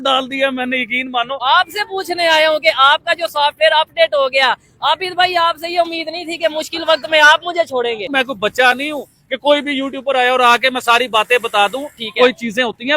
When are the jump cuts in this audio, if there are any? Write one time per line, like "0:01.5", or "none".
0:01.4
0:08.1